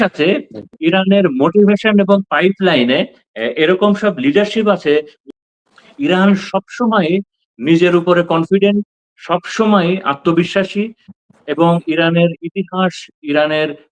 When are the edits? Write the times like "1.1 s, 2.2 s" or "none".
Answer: 5.2 s